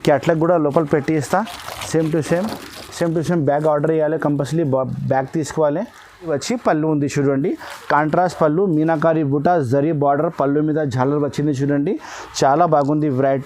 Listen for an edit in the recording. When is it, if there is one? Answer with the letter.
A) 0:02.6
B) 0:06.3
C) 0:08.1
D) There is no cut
B